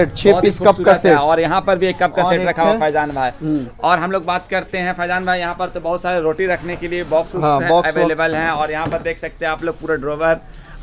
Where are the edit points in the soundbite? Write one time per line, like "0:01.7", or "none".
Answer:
none